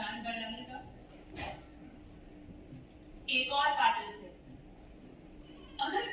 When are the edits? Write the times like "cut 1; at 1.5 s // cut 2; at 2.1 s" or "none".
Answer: none